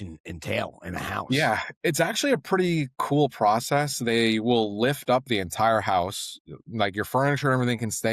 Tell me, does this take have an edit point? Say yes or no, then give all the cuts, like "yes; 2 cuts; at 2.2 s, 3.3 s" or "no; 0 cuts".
no; 0 cuts